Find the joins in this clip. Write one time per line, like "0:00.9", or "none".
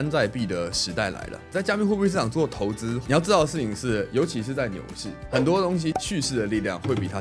0:03.0